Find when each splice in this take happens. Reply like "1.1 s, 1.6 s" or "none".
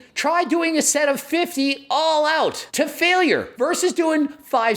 2.6 s, 3.5 s